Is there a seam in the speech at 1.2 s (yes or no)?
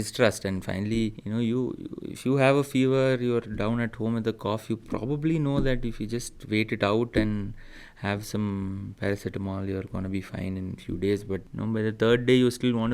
yes